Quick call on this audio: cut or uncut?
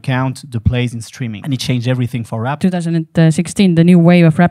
cut